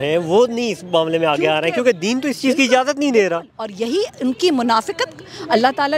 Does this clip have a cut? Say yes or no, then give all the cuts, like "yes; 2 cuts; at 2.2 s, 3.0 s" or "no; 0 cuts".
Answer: no; 0 cuts